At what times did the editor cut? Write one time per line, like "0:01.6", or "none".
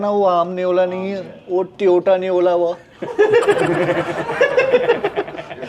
none